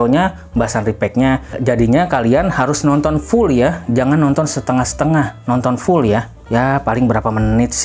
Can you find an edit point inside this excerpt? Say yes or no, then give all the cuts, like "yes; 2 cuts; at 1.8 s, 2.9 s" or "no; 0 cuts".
yes; 1 cut; at 1.6 s